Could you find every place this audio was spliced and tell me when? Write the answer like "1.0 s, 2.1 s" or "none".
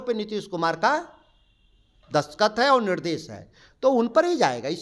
none